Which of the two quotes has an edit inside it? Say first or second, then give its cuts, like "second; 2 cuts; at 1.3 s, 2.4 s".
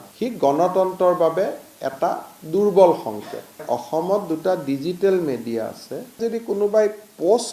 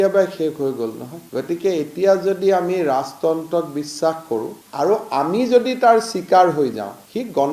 first; 2 cuts; at 3.6 s, 6.2 s